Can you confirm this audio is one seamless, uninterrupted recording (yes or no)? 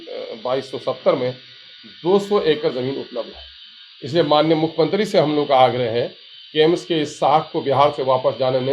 yes